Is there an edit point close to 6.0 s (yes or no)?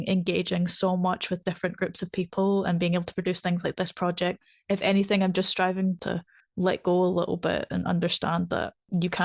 yes